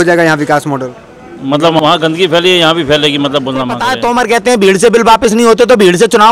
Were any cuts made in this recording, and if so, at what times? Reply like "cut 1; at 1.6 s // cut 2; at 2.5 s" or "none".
cut 1; at 1.8 s // cut 2; at 3.8 s